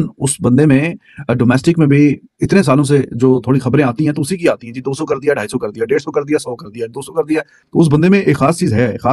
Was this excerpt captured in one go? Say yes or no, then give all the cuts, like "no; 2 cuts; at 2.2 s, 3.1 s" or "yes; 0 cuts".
yes; 0 cuts